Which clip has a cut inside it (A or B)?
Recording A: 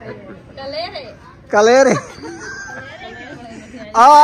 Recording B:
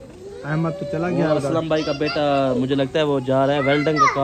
A